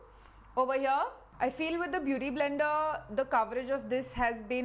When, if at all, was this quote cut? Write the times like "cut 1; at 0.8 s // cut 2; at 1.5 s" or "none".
cut 1; at 1.2 s